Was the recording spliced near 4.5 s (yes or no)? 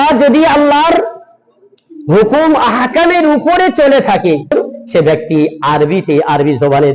yes